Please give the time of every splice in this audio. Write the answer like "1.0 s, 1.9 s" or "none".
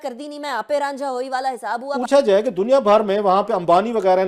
2.0 s